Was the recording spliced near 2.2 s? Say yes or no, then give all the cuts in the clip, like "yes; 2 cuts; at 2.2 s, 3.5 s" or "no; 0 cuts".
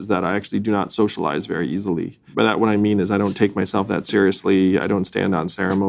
yes; 1 cut; at 2.2 s